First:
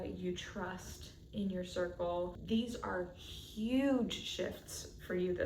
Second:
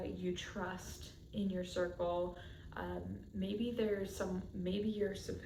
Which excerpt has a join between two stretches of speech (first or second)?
first